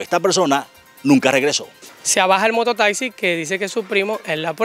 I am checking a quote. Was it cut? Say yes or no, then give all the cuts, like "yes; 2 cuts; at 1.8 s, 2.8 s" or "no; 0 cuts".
yes; 1 cut; at 1.7 s